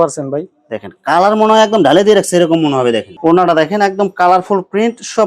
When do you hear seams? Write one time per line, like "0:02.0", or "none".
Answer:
0:03.1